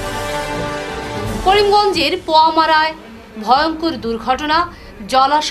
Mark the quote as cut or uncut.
cut